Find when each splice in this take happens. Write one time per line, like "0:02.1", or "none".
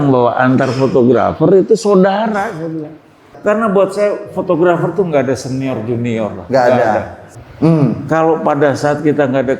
0:03.3
0:07.2